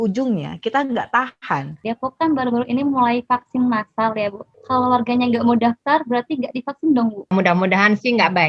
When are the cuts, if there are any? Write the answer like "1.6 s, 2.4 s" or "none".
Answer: 1.8 s, 4.5 s, 7.3 s